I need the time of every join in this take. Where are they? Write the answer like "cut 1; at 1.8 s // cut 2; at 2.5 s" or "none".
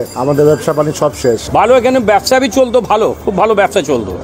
cut 1; at 1.4 s

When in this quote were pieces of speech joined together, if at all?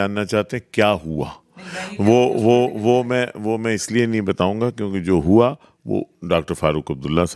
none

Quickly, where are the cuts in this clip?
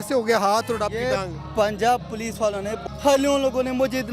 cut 1; at 2.8 s

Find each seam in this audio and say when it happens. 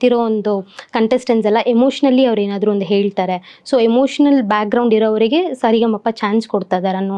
none

